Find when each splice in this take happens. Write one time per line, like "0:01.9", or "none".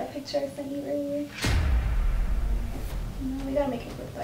0:02.8